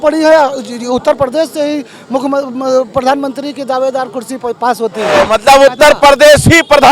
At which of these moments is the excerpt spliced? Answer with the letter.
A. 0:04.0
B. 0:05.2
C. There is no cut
B